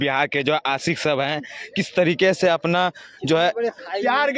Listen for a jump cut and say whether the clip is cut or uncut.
cut